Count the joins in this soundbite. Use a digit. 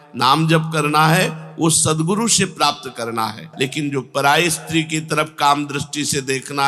1